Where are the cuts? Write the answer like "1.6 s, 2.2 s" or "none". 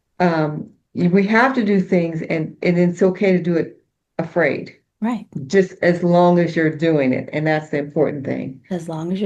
none